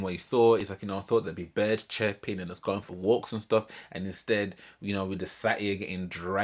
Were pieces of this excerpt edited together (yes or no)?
no